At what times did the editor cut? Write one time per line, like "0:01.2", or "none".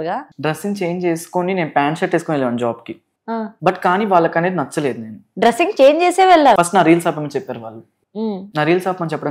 0:03.5
0:05.2
0:06.6